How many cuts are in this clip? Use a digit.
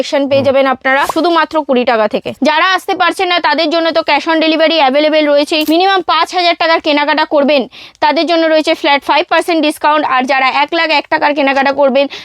3